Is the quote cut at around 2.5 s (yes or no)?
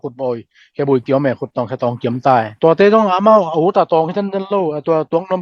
yes